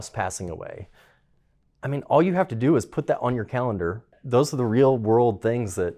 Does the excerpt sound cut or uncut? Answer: cut